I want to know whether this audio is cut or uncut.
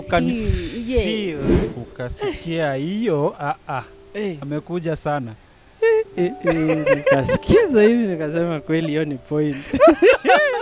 cut